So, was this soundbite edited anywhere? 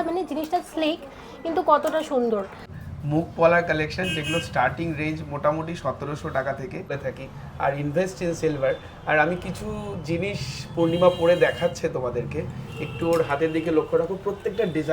yes; 2 cuts; at 2.7 s, 6.9 s

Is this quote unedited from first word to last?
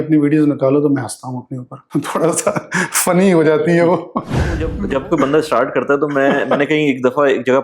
no; 2 cuts; at 1.8 s, 4.7 s

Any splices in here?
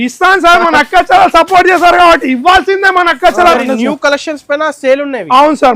yes; 1 cut; at 3.5 s

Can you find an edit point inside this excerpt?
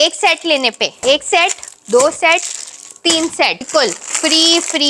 yes; 2 cuts; at 1.0 s, 3.8 s

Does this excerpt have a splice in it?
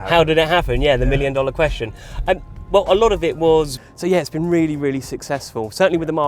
yes; 1 cut; at 3.8 s

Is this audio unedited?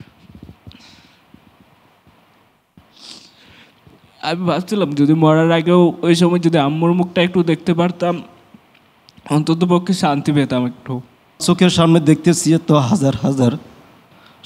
no; 1 cut; at 11.4 s

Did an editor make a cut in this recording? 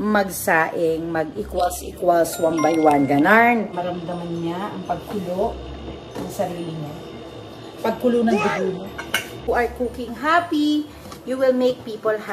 yes; 2 cuts; at 3.8 s, 9.5 s

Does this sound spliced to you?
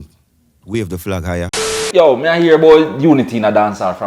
yes; 1 cut; at 1.8 s

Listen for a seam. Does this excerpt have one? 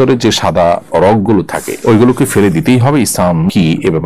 no; 0 cuts

